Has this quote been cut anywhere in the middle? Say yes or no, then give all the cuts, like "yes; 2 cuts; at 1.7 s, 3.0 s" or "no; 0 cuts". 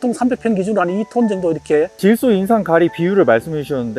yes; 1 cut; at 1.9 s